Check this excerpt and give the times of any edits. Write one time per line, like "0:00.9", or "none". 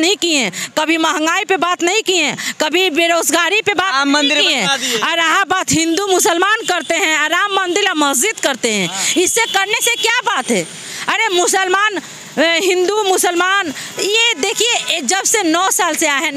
none

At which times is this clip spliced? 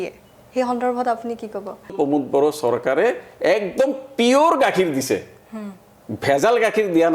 0:01.9

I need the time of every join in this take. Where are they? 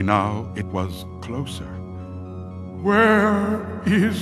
0:03.3

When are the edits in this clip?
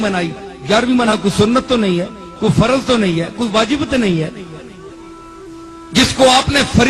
0:01.1

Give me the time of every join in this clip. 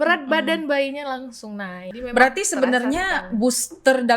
0:01.8

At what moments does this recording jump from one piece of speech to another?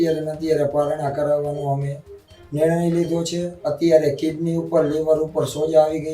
0:03.5

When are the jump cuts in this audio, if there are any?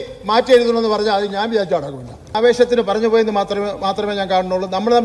0:02.3

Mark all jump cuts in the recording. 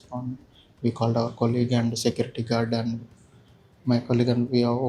none

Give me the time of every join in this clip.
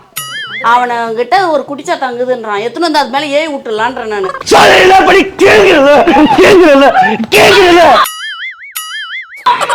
0:04.3

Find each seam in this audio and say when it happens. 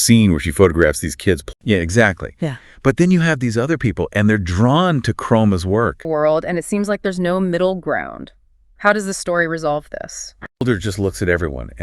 0:01.4
0:06.0
0:10.6

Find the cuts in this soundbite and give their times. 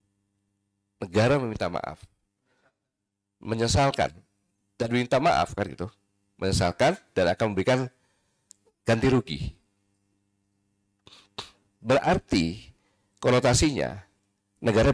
none

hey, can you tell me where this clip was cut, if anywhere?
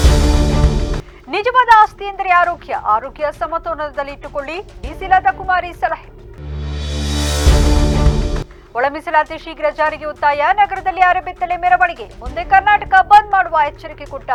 none

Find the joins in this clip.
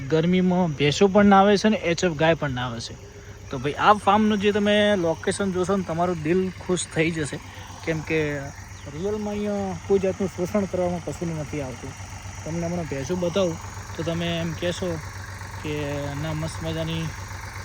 none

